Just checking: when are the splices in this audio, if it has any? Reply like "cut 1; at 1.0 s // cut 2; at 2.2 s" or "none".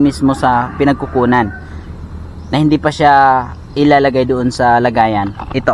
none